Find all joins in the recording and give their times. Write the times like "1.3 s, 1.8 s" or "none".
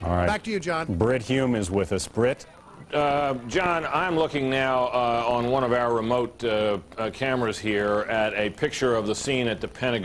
4.7 s